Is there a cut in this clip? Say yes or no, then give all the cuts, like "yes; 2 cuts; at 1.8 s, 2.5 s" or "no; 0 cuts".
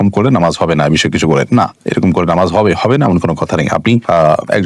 no; 0 cuts